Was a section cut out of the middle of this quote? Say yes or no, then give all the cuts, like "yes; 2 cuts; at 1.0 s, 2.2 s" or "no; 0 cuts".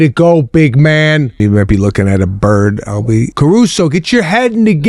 yes; 2 cuts; at 1.4 s, 3.3 s